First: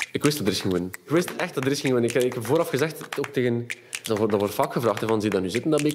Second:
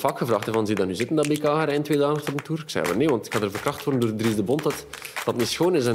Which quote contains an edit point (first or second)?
first